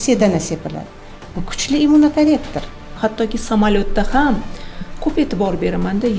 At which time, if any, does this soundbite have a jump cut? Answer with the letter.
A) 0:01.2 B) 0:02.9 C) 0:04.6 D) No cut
B